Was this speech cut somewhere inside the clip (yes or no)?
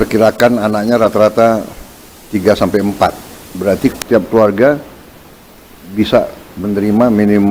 no